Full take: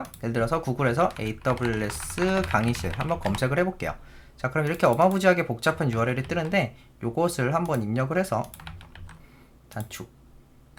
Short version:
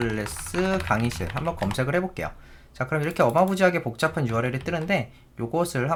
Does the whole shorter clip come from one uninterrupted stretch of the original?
yes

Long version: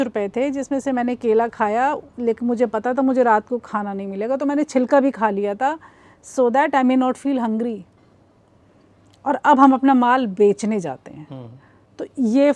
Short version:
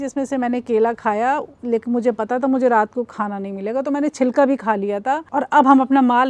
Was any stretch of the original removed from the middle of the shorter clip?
yes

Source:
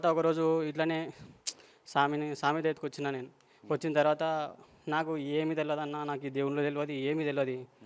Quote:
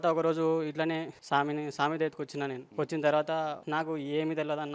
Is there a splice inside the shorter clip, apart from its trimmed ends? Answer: yes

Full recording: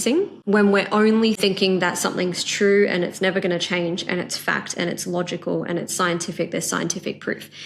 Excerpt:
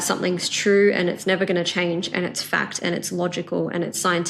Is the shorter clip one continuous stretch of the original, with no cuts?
yes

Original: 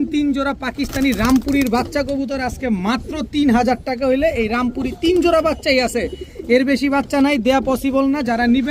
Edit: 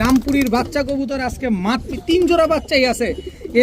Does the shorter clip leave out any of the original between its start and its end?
yes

